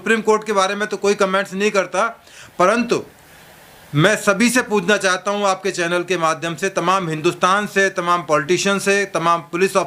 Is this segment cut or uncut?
uncut